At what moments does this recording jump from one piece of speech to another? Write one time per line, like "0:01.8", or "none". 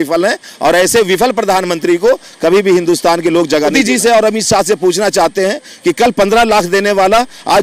0:03.7